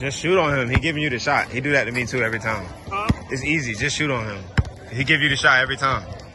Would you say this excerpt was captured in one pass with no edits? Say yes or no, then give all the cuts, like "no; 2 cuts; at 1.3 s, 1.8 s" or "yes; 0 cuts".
yes; 0 cuts